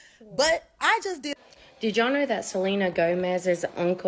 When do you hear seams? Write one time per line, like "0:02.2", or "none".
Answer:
0:01.3